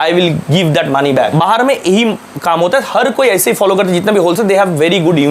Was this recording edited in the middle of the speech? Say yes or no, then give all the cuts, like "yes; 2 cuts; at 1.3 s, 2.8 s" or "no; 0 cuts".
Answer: yes; 1 cut; at 1.3 s